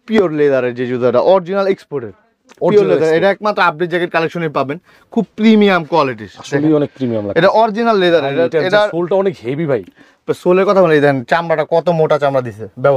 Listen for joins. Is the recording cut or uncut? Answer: uncut